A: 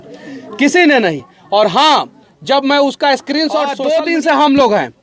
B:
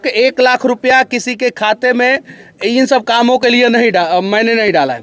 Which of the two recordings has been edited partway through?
A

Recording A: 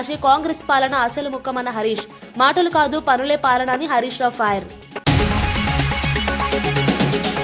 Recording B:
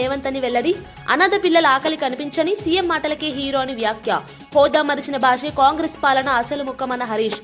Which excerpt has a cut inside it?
A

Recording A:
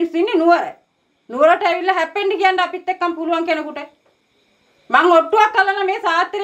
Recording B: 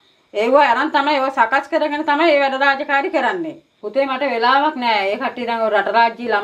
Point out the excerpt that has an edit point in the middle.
B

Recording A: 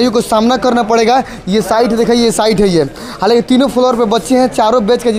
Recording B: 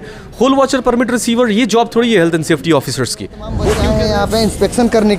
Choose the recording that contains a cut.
B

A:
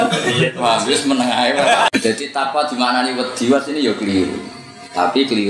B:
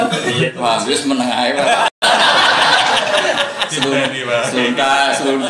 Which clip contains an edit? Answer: A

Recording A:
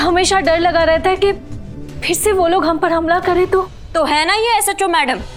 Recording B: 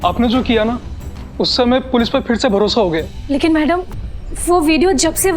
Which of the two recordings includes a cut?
B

